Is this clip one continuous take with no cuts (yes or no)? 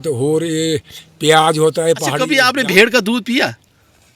no